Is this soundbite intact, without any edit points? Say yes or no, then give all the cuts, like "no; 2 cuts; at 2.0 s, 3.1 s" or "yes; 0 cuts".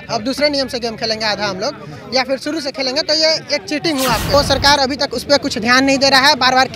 no; 1 cut; at 4.3 s